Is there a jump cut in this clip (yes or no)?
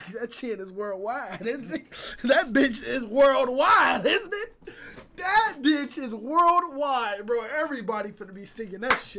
no